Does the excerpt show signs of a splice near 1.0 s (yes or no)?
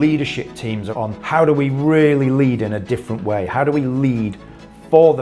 yes